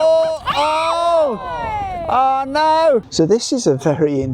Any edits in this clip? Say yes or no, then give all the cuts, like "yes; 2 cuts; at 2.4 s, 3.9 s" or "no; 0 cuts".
yes; 1 cut; at 3.1 s